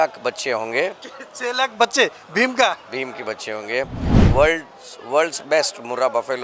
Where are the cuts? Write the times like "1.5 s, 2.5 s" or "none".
4.0 s